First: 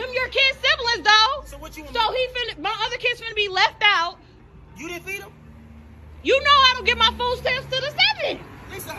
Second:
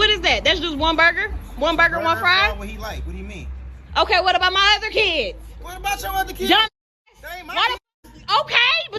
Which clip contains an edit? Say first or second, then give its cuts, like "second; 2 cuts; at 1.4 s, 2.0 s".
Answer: first; 1 cut; at 1.1 s